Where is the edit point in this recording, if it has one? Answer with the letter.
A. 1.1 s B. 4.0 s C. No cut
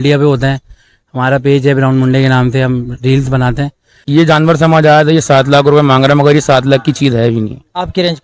B